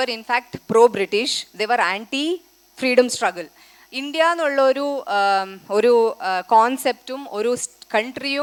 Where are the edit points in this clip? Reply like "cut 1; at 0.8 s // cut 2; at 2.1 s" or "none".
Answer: none